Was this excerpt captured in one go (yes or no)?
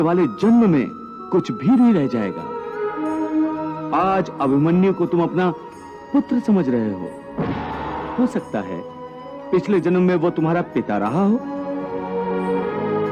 no